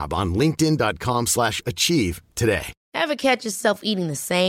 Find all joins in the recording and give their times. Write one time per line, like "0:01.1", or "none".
0:02.8